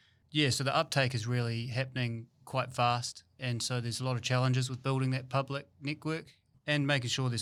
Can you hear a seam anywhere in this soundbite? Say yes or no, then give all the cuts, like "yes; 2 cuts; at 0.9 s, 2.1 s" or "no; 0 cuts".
no; 0 cuts